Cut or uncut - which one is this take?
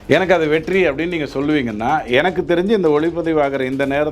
uncut